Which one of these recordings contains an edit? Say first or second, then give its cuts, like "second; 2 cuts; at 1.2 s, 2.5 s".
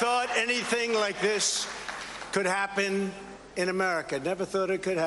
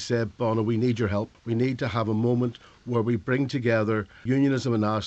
second; 1 cut; at 1.4 s